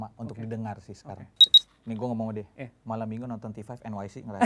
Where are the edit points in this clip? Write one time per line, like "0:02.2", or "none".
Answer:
0:01.6